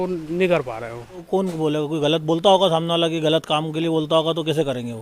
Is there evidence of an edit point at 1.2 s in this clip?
yes; 1 cut; at 1.2 s

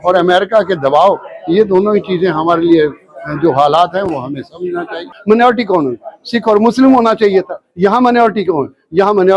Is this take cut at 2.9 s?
no; 1 cut; at 5.1 s

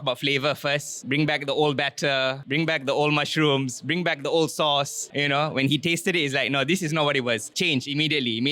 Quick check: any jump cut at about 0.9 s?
no; 0 cuts

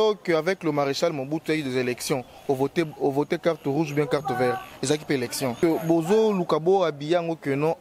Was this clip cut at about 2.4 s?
no; 1 cut; at 5.5 s

